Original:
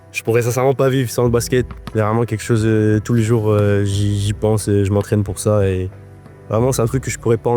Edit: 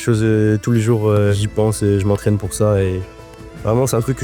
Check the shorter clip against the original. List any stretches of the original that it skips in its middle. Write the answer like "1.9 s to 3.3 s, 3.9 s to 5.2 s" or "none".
3.8 s to 4.2 s